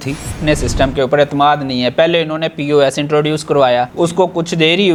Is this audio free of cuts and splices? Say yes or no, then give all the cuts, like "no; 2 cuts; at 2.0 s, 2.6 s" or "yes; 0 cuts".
yes; 0 cuts